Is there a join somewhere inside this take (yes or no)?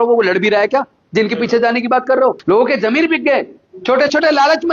yes